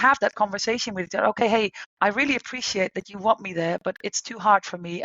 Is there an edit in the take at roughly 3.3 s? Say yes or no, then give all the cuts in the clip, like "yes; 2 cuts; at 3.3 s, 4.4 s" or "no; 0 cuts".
no; 1 cut; at 1.8 s